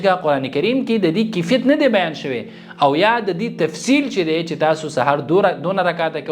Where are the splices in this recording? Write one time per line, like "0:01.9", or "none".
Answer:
none